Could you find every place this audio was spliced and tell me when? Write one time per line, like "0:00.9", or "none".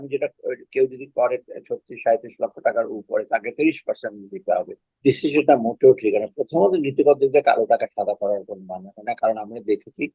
0:04.9